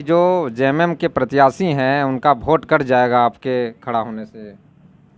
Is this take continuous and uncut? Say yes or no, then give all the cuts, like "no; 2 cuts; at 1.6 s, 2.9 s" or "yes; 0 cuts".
yes; 0 cuts